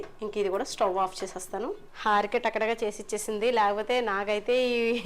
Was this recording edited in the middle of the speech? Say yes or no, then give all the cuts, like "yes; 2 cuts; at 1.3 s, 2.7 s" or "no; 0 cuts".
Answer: yes; 1 cut; at 1.9 s